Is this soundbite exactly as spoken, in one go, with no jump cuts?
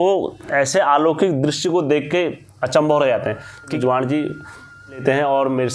no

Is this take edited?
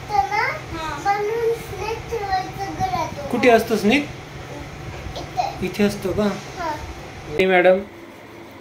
yes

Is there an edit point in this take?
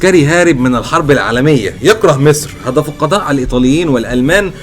no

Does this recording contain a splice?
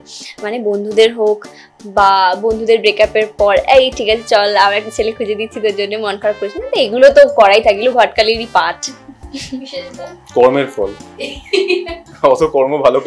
no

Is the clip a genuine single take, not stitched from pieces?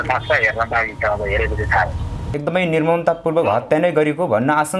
no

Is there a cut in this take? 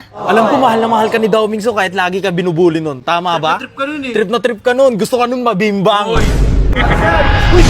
yes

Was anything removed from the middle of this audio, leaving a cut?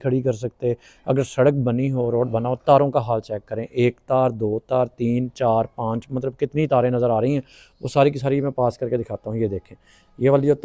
no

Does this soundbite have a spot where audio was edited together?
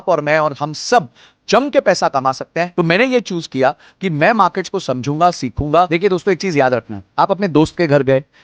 yes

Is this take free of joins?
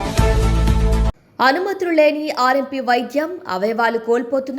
no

